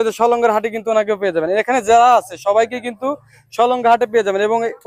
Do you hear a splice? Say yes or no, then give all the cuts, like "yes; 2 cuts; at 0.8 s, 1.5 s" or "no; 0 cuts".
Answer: no; 0 cuts